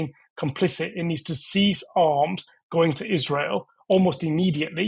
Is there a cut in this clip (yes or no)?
no